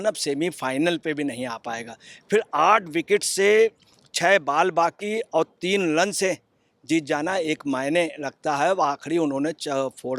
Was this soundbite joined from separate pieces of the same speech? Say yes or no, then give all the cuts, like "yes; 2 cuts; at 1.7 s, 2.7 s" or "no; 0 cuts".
no; 0 cuts